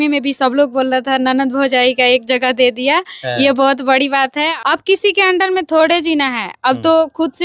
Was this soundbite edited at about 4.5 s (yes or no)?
yes